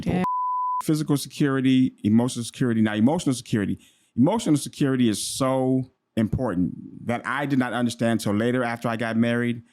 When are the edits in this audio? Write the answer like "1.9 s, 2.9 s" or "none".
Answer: 0.8 s, 6.0 s